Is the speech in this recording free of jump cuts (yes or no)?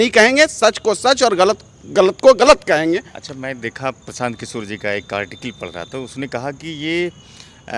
yes